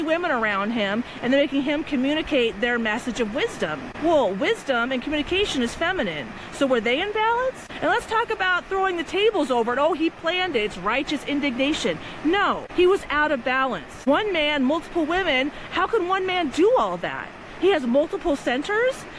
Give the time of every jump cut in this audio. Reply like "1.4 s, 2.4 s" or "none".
3.9 s, 7.7 s, 12.6 s, 13.9 s